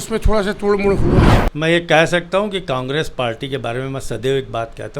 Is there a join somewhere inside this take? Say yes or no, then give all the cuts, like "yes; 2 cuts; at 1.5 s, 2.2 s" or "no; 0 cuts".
yes; 1 cut; at 1.4 s